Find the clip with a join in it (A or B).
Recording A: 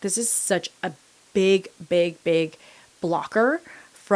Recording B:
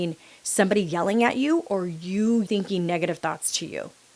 B